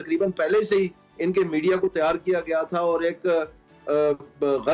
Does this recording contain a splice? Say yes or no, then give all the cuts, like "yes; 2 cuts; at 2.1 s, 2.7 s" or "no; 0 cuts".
no; 0 cuts